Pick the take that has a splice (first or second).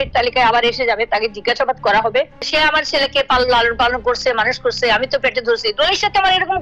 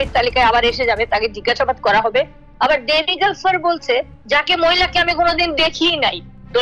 first